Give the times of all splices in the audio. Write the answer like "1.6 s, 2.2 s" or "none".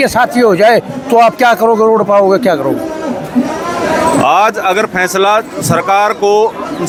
none